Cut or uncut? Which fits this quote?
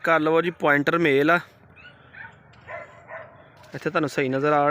uncut